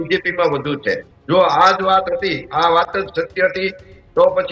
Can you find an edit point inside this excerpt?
yes; 1 cut; at 1.1 s

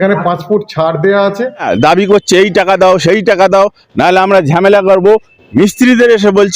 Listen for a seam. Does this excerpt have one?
yes; 1 cut; at 1.7 s

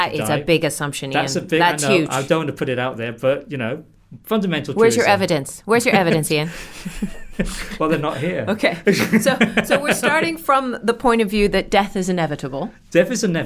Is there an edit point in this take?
no; 0 cuts

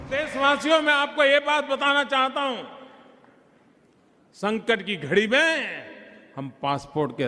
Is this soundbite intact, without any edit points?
yes; 0 cuts

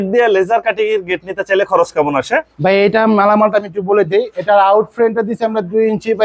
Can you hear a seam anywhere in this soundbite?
no; 0 cuts

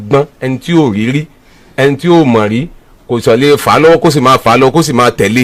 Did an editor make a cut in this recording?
no; 0 cuts

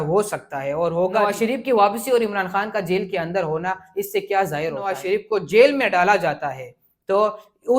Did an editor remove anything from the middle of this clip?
yes; 2 cuts; at 1.3 s, 4.9 s

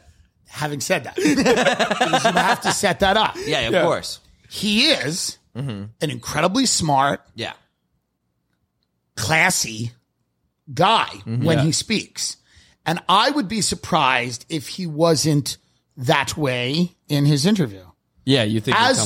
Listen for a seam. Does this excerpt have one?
no; 0 cuts

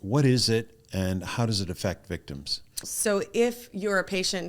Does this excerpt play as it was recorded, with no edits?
no; 1 cut; at 2.8 s

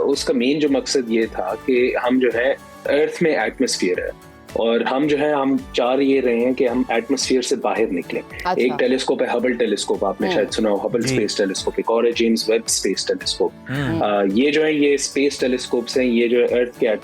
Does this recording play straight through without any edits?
yes; 0 cuts

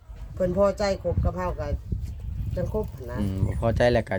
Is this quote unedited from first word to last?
yes; 0 cuts

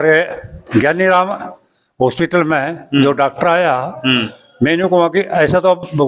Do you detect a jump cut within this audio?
no; 0 cuts

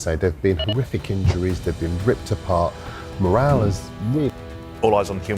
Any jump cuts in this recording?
yes; 1 cut; at 4.3 s

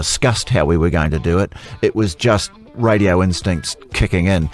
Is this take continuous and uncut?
yes; 0 cuts

